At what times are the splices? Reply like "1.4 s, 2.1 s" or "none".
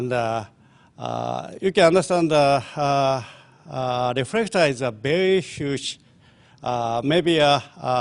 3.0 s